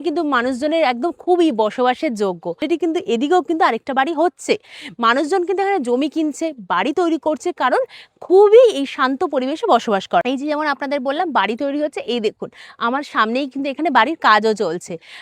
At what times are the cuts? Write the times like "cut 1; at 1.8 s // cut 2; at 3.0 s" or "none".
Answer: cut 1; at 2.6 s // cut 2; at 10.2 s